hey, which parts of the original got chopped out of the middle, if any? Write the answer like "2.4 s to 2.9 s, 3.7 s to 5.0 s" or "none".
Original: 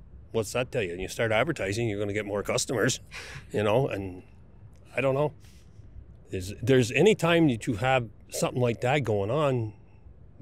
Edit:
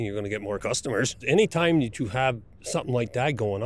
3.1 s to 6.9 s